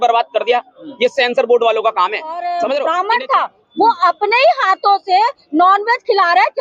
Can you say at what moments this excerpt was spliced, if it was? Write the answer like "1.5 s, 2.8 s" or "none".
2.8 s